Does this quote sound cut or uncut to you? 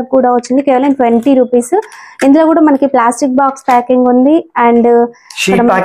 uncut